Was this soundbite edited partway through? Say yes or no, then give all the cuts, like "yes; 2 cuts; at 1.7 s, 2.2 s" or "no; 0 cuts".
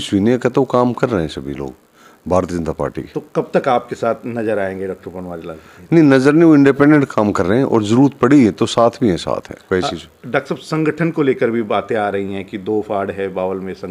no; 0 cuts